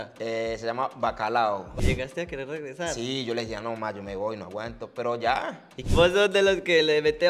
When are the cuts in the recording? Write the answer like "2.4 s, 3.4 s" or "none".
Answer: 1.8 s, 5.8 s

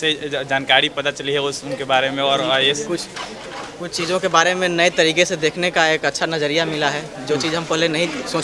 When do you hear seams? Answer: none

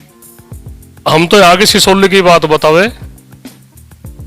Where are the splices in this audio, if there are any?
1.0 s

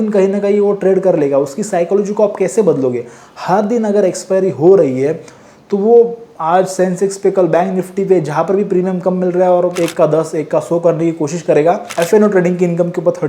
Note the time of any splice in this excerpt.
9.7 s, 11.9 s

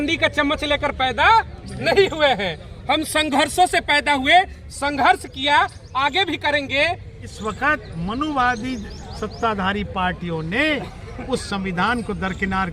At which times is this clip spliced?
7.2 s

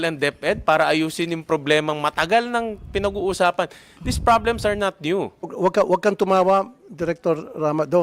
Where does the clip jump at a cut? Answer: 5.5 s

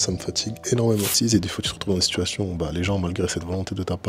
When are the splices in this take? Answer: 1.1 s

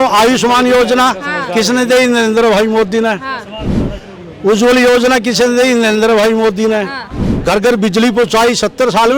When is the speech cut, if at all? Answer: 7.3 s

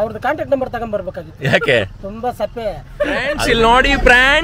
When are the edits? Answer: 3.3 s

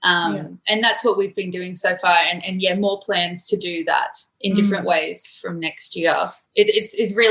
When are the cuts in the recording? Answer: 6.4 s

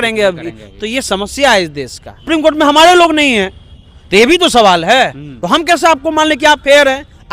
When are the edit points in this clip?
2.3 s

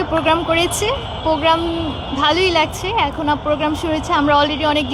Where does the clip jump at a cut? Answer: none

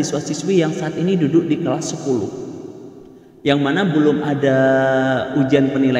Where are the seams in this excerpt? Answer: none

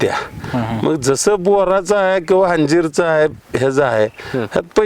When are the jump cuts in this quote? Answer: none

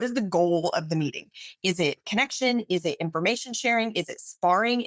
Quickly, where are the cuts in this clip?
none

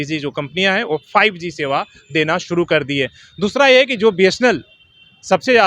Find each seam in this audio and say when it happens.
none

